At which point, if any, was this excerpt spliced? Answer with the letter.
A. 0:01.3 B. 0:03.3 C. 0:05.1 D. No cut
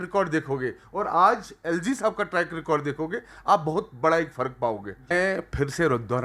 C